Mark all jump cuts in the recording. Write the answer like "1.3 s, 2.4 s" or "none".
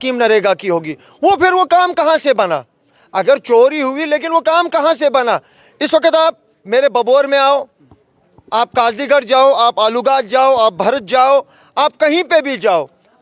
none